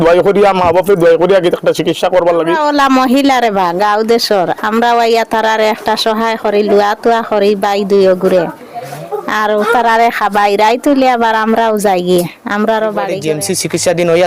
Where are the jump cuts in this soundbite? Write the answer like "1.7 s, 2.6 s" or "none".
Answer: 2.6 s, 13.1 s

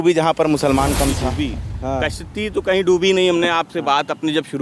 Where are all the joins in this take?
1.3 s

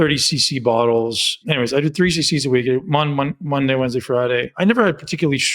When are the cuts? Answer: 1.4 s, 4.5 s

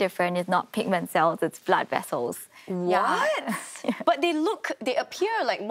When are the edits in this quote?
none

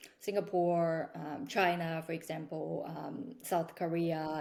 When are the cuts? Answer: none

